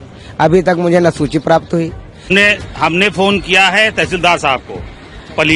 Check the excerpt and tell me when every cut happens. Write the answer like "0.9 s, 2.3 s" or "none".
2.3 s